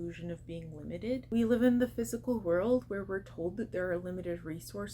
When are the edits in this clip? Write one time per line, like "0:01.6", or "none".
0:01.3